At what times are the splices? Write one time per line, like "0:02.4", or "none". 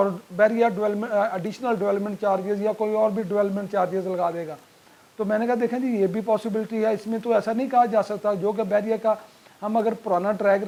none